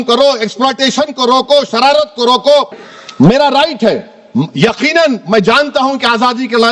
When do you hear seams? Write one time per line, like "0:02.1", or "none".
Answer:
0:02.8